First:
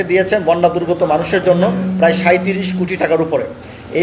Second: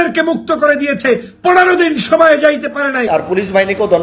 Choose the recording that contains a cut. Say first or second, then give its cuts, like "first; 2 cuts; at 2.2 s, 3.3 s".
second; 1 cut; at 3.1 s